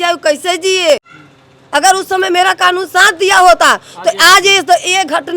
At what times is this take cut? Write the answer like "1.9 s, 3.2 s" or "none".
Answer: 1.2 s